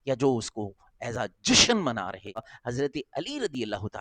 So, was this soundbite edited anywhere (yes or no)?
yes